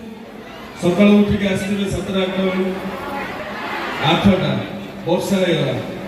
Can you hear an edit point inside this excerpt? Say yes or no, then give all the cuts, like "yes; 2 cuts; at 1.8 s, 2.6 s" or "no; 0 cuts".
no; 0 cuts